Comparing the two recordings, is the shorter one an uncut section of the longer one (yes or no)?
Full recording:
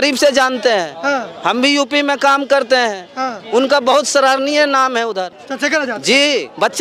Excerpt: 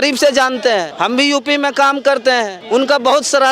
no